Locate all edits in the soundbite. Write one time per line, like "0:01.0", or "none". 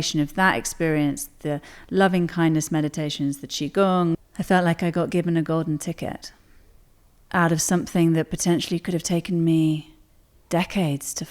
0:04.2